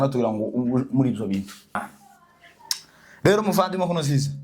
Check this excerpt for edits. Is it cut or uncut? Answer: cut